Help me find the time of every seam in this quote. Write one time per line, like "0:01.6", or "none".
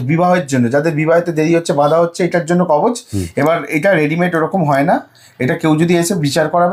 none